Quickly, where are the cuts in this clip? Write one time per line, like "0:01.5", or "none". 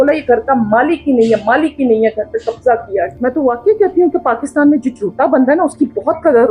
0:03.1